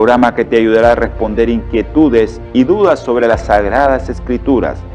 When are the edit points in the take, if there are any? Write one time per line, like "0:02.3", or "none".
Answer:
none